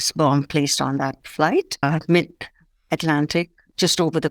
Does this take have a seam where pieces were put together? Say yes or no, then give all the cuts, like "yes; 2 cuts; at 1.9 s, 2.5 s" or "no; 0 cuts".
yes; 1 cut; at 1.8 s